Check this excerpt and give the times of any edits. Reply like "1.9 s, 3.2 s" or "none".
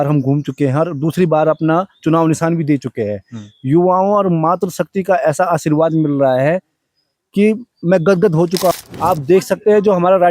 8.7 s

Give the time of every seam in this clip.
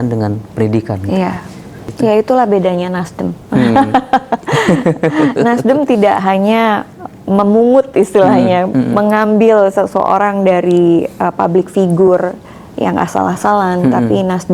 1.8 s

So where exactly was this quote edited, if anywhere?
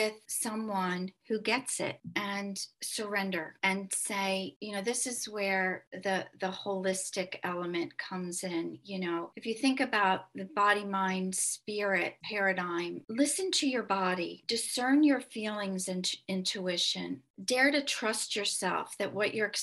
none

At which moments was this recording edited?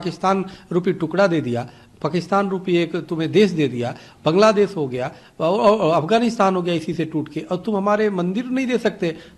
none

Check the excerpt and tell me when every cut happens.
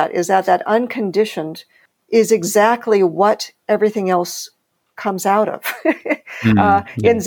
none

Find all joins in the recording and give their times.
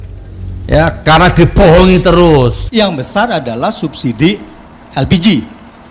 2.6 s

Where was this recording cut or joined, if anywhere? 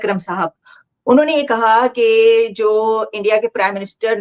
none

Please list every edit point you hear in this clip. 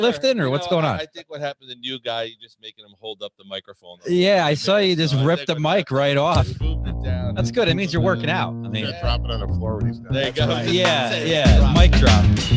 11.4 s

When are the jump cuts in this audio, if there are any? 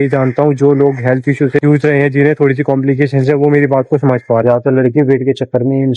4.4 s

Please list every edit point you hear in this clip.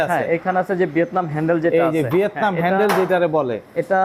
none

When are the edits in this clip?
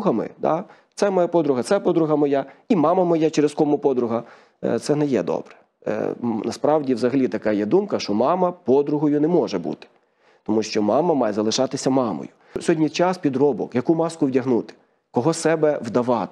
12.6 s

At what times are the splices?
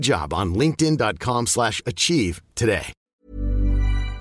3.1 s

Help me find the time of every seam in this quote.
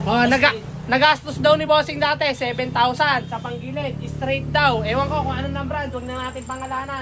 none

